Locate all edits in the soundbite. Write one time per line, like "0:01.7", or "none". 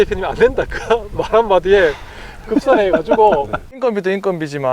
0:03.6